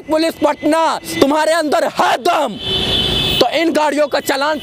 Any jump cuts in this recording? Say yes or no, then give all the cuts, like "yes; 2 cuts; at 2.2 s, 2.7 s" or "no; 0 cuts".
no; 0 cuts